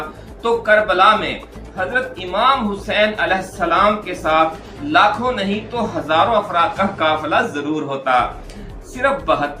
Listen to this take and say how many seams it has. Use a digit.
0